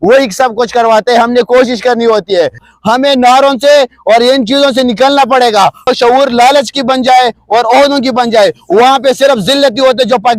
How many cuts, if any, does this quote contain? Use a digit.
2